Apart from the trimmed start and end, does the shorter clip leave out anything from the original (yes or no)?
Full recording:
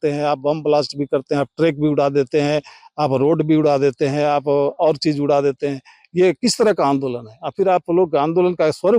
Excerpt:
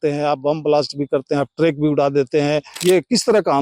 yes